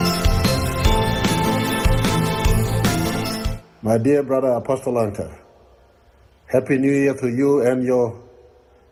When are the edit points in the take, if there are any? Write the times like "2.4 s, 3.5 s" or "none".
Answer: none